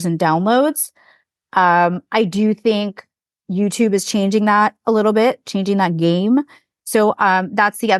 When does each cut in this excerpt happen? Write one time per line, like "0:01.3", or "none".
none